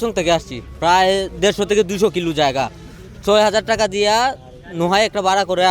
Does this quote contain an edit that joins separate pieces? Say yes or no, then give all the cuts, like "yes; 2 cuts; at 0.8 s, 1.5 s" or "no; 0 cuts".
no; 0 cuts